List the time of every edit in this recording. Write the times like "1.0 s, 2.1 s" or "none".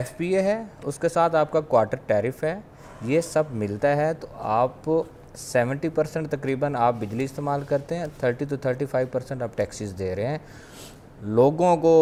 none